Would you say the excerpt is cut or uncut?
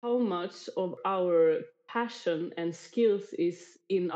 cut